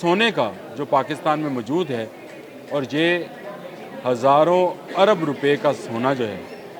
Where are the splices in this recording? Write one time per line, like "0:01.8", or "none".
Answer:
none